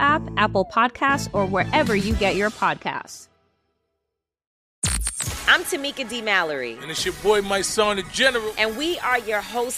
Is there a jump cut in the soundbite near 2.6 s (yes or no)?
no